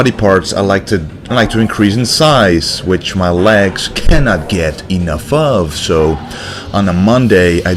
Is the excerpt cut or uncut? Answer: uncut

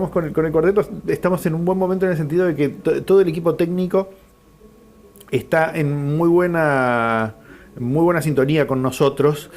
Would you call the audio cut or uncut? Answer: cut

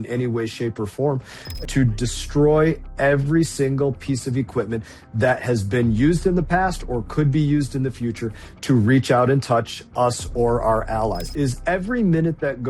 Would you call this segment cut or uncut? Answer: cut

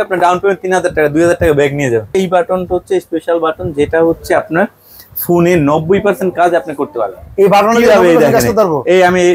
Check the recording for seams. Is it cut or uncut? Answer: cut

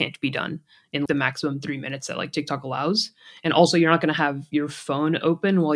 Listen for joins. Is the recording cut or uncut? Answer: cut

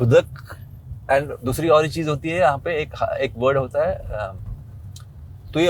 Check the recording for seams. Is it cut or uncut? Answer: uncut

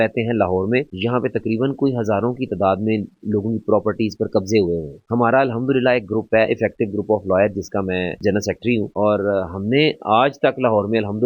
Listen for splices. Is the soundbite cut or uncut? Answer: uncut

